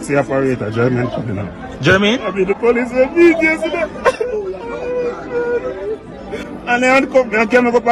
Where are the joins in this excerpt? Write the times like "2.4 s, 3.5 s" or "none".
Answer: 6.4 s